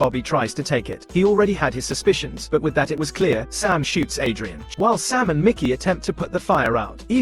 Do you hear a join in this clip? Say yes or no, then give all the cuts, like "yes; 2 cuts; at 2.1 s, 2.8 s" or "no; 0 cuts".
yes; 2 cuts; at 1.0 s, 4.6 s